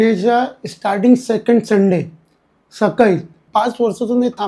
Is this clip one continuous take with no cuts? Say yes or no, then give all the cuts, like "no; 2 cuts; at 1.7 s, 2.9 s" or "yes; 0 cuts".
no; 1 cut; at 3.4 s